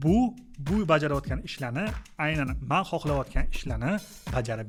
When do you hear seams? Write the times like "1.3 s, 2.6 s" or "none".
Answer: none